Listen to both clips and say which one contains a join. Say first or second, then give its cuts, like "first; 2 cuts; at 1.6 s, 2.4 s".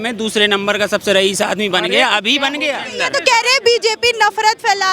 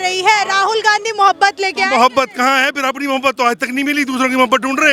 first; 1 cut; at 2.8 s